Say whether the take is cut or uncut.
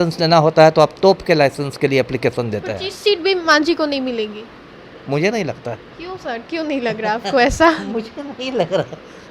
uncut